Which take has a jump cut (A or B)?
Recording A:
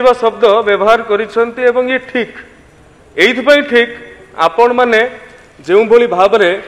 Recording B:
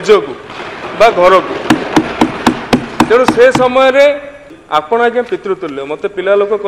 B